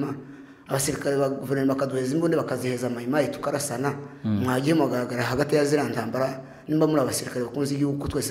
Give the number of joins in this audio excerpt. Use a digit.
0